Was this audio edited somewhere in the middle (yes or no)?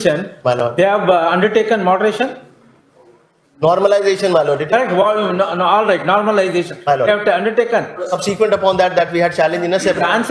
no